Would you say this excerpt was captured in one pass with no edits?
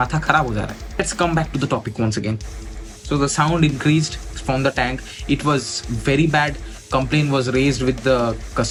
yes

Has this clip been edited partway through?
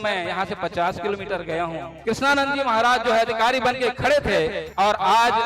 yes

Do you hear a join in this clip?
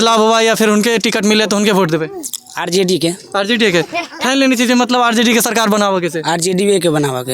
no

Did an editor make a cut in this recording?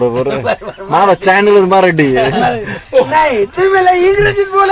no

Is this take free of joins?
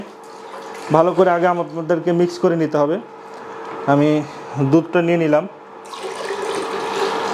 yes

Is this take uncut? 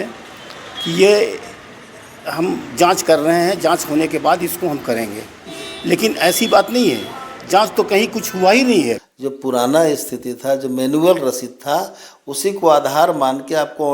no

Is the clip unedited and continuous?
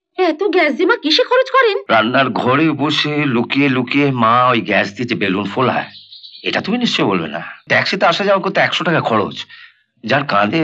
no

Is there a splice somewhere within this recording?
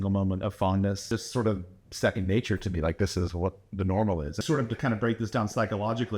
yes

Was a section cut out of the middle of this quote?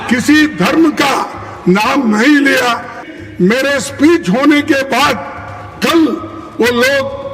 yes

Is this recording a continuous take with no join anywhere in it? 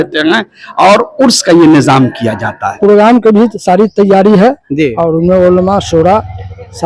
no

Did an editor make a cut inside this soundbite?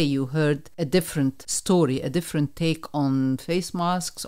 yes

